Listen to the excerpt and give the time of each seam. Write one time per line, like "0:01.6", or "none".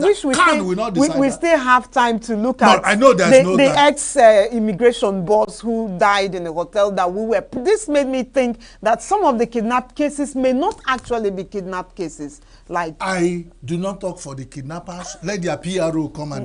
0:07.6